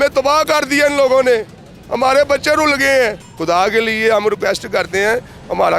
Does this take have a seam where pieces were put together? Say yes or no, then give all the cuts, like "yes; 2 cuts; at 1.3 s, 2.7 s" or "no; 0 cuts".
yes; 1 cut; at 3.3 s